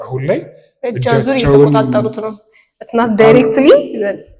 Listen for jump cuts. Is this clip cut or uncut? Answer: uncut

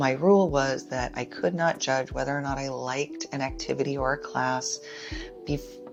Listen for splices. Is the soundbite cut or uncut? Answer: uncut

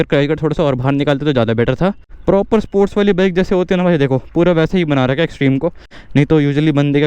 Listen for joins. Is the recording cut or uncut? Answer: cut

